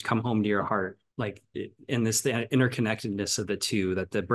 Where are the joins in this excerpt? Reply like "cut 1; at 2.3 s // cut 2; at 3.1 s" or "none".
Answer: cut 1; at 1.1 s